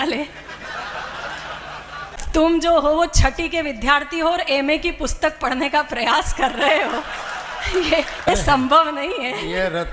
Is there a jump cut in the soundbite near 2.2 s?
yes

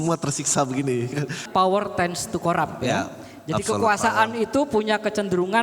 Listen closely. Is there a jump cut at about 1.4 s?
yes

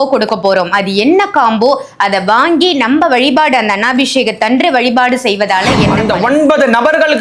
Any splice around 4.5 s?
no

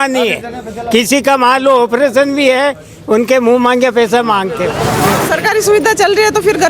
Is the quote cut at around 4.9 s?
yes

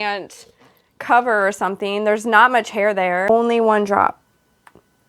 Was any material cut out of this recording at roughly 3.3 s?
yes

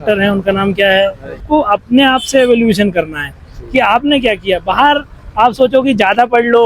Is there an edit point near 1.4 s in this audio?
yes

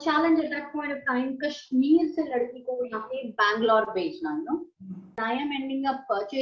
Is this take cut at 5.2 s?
yes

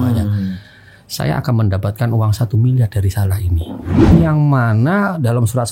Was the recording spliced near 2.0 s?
no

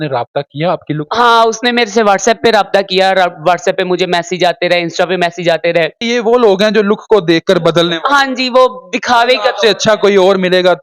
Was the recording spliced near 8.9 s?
no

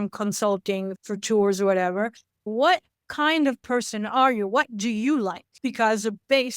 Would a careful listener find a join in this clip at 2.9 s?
no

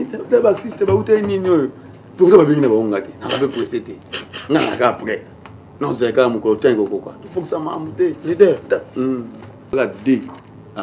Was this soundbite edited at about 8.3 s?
no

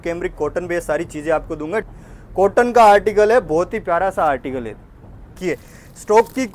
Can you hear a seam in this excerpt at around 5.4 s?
yes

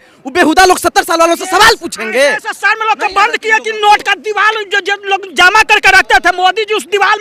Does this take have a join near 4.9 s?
no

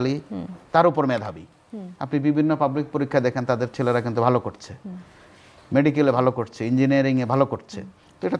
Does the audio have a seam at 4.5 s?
no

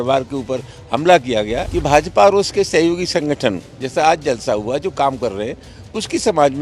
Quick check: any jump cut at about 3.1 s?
no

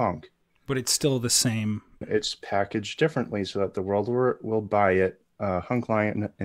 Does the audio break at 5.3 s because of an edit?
no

